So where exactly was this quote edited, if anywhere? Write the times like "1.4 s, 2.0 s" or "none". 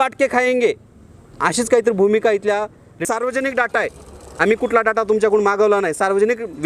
3.0 s